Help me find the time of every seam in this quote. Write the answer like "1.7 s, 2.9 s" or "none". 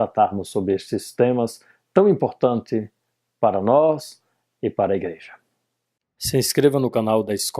5.2 s